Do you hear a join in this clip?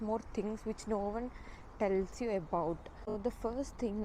yes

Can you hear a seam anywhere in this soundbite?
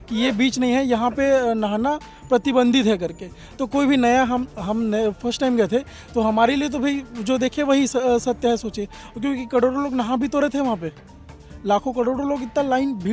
no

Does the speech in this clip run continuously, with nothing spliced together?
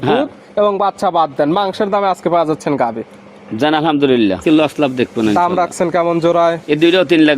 no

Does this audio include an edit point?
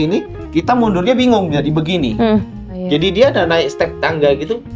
yes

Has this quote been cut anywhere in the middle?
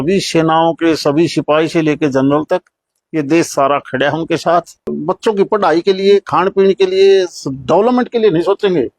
yes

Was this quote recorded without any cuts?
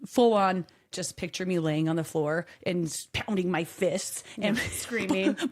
no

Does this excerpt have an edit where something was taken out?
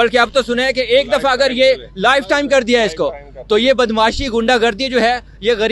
no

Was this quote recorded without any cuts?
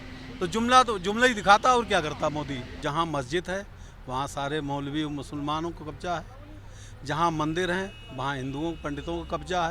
no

